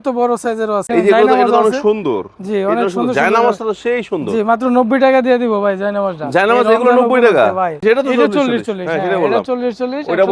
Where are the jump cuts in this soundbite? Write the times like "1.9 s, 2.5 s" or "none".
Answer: 0.9 s, 7.8 s